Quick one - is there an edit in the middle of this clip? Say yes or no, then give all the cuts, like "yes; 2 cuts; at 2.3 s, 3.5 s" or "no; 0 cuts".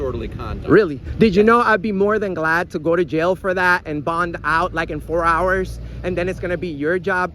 no; 0 cuts